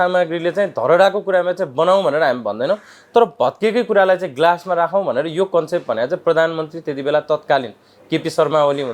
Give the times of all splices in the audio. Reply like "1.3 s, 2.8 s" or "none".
none